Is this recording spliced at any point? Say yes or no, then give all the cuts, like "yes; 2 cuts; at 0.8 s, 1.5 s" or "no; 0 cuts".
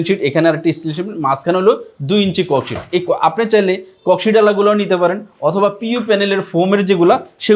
no; 0 cuts